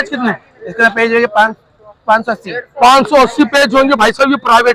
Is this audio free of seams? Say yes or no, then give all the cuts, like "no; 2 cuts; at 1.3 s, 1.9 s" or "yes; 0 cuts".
yes; 0 cuts